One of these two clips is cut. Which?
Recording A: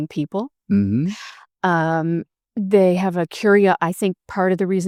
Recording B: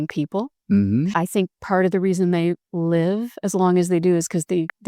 B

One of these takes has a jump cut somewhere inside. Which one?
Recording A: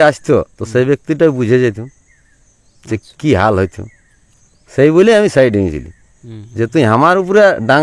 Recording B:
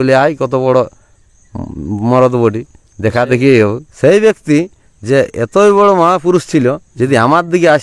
B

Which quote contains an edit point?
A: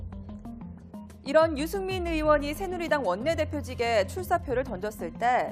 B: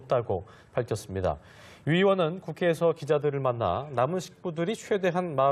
A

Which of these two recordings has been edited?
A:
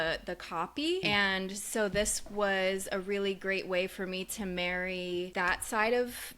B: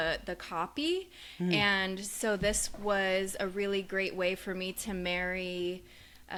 A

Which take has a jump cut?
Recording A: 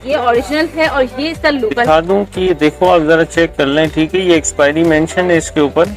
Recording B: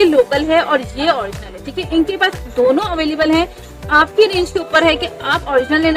A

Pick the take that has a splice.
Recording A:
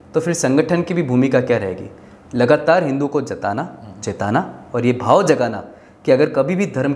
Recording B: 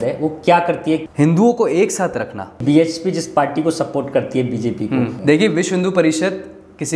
B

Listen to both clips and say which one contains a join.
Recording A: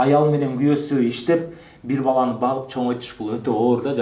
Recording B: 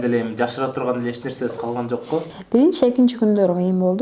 B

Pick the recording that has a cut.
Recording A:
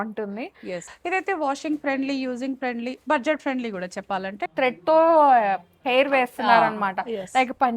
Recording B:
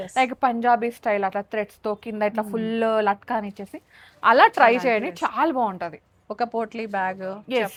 A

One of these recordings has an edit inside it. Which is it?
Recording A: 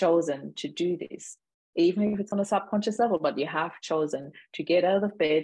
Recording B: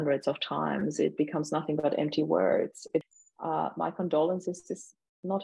B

